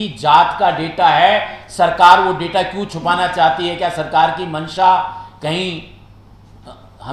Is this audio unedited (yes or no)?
yes